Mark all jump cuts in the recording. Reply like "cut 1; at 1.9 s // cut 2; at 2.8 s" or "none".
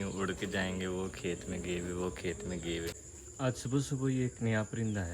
cut 1; at 3.1 s